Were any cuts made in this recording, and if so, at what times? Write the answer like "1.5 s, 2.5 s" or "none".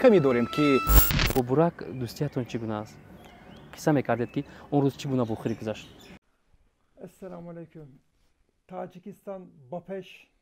1.2 s